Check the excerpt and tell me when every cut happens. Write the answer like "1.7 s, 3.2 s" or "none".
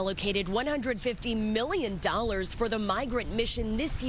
none